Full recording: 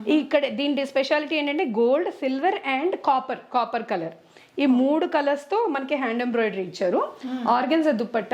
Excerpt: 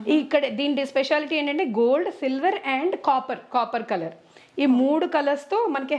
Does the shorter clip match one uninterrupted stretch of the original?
yes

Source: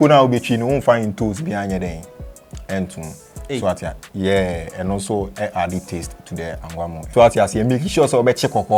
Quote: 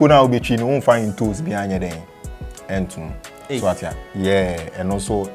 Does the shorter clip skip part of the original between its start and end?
no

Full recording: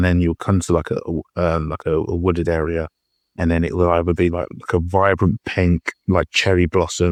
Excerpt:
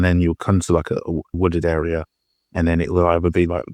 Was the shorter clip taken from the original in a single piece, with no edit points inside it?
no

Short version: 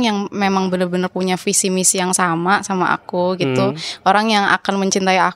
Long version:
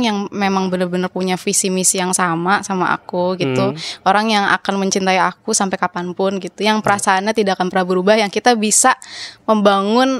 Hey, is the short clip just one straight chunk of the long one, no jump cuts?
yes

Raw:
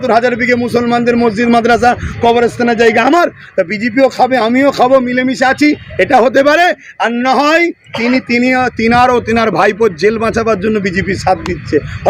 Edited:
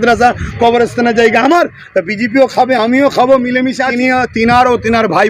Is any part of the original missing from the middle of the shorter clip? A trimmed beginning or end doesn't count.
yes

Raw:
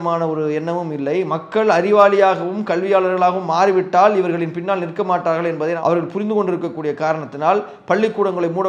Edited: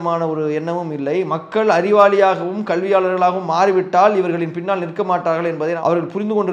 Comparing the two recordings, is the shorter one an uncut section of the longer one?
yes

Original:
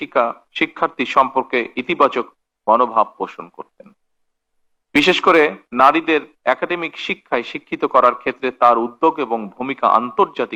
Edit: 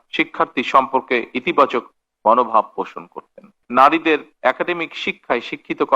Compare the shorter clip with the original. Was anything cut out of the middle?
yes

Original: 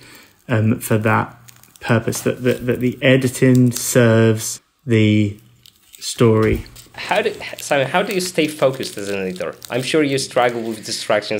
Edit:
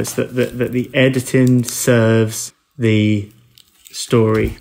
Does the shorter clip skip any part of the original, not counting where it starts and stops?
no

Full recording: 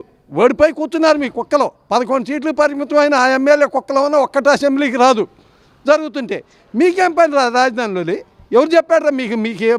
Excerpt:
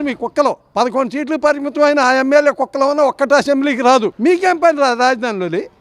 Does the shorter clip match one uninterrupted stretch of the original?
no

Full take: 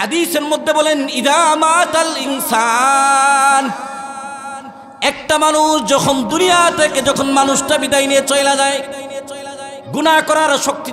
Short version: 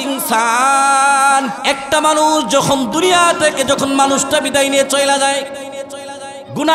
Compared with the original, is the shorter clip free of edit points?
no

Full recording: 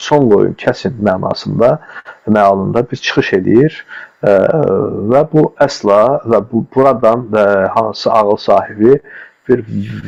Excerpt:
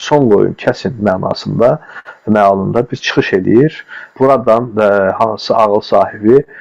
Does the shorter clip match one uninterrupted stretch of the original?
no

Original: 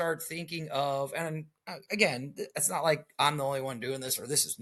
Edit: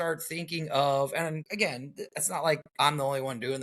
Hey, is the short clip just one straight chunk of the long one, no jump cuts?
no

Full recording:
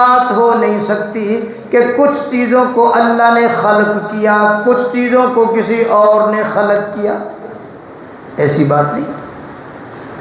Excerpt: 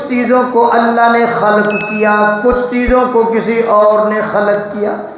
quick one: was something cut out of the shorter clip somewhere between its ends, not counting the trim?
no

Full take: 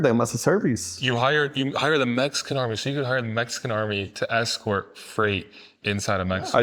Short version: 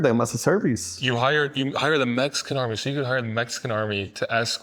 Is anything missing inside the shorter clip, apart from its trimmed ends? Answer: no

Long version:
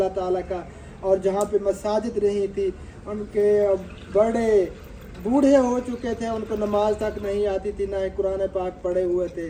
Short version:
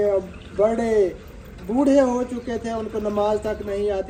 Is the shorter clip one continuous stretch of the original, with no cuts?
yes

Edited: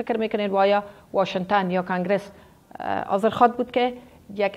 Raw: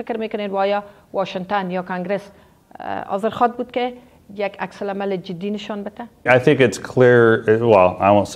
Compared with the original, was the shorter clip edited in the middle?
no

